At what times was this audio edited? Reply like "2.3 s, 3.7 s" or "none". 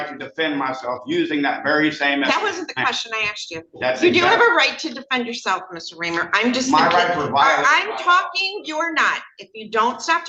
none